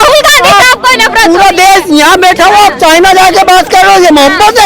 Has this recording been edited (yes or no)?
no